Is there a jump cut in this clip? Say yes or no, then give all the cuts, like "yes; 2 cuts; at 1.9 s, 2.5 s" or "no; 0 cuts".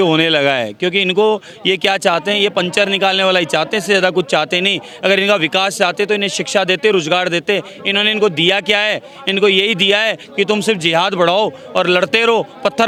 no; 0 cuts